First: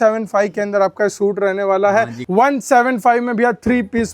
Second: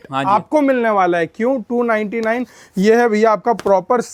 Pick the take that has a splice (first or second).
first